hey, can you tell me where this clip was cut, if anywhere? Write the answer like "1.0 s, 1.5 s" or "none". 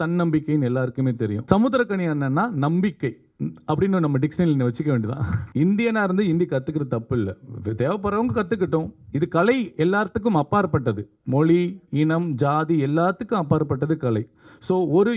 1.4 s, 5.4 s

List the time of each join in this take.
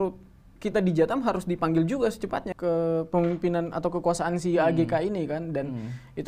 2.5 s

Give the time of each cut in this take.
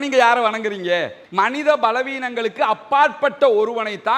1.2 s

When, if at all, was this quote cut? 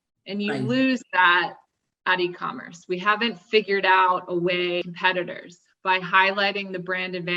4.9 s

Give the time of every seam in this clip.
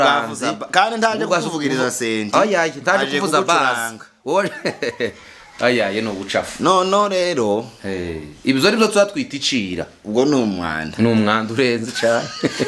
none

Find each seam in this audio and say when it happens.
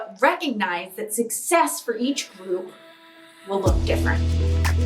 4.0 s

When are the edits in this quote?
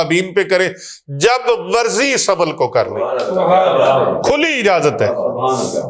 none

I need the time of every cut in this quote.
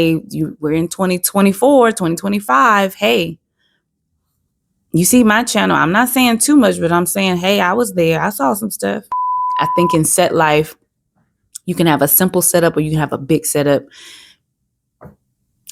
9.5 s

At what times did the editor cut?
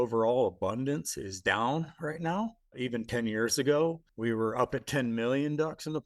2.8 s, 4.1 s

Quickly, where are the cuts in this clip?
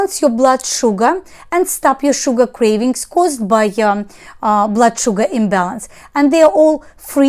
none

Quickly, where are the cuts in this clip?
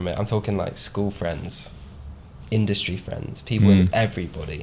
none

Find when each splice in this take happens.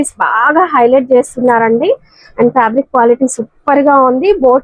none

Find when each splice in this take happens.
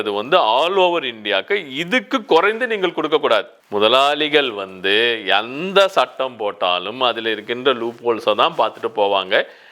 3.5 s

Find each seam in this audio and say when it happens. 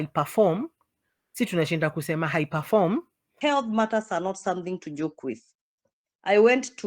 3.2 s

